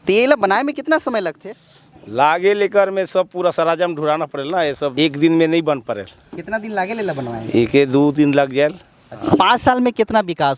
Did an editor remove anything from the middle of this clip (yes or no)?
yes